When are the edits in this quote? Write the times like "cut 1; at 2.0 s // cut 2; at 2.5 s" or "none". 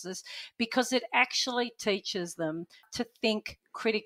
cut 1; at 2.9 s